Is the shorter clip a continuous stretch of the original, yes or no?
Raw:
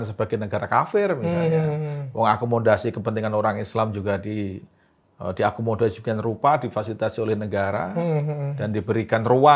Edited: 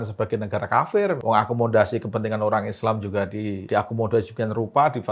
no